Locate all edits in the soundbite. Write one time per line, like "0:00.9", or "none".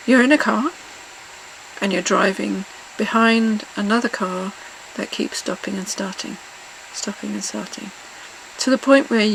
none